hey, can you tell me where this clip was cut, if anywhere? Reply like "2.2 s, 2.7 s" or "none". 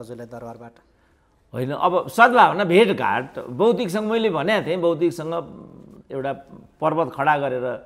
none